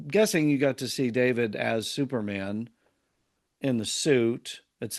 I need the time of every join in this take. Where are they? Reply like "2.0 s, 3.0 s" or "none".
none